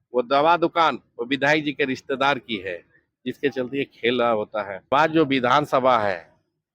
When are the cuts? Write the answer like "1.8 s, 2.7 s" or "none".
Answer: 4.9 s